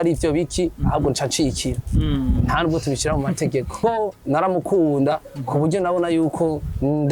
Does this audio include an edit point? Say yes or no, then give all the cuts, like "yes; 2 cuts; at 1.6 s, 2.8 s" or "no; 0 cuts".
yes; 1 cut; at 3.8 s